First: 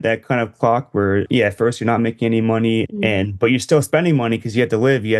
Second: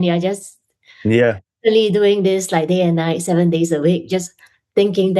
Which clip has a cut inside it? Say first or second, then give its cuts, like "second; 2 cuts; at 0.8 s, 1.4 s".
first; 2 cuts; at 1.2 s, 2.9 s